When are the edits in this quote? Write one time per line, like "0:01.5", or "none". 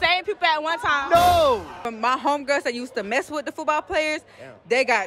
0:01.8